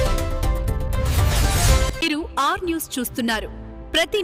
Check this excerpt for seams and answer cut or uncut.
uncut